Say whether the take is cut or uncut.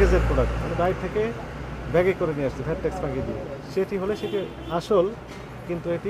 uncut